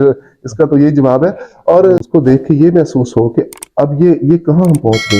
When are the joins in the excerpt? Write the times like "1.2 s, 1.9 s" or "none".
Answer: 2.0 s

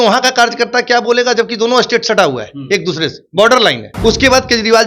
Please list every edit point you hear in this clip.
3.9 s

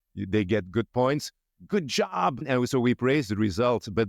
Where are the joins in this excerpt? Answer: 2.4 s

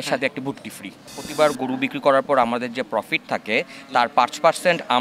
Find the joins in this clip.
1.2 s

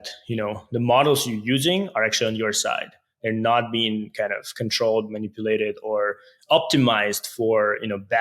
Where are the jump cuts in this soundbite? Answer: none

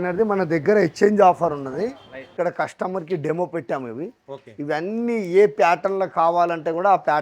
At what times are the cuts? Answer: 2.3 s

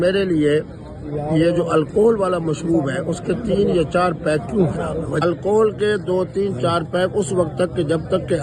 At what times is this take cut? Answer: 5.2 s

